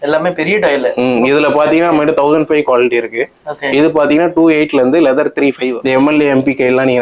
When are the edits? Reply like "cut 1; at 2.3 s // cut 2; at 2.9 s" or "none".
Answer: cut 1; at 5.6 s